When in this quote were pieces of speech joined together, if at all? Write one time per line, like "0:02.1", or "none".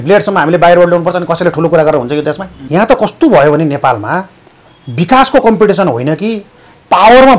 0:02.5